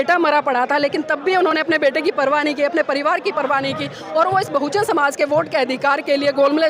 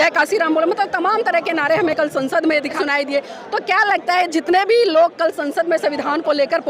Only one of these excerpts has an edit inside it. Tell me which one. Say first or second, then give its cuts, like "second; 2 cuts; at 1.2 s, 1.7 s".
second; 1 cut; at 2.8 s